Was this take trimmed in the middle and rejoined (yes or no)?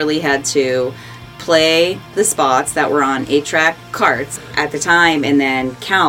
yes